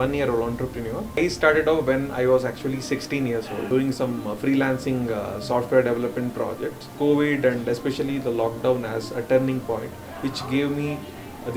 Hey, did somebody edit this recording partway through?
yes; 3 cuts; at 1.2 s, 3.7 s, 6.9 s

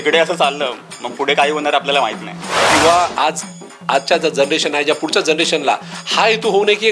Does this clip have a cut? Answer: yes; 1 cut; at 2.7 s

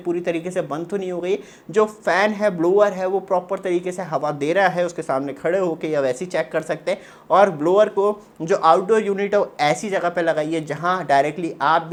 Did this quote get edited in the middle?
no; 0 cuts

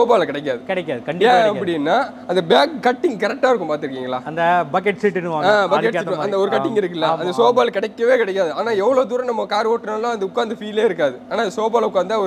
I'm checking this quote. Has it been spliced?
no; 0 cuts

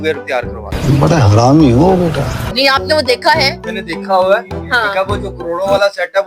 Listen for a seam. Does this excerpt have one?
no; 0 cuts

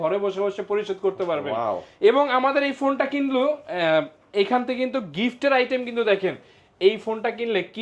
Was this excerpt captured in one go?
yes; 0 cuts

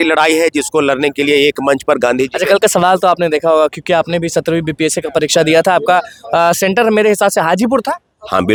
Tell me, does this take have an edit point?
no; 0 cuts

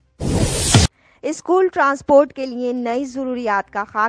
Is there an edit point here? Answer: yes; 1 cut; at 1.0 s

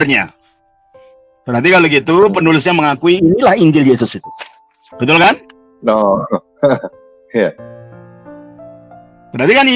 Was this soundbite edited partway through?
no; 0 cuts

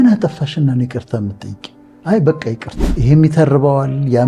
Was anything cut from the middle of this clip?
yes; 1 cut; at 2.8 s

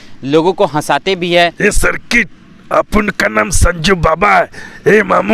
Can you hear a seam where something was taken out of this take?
yes; 1 cut; at 1.5 s

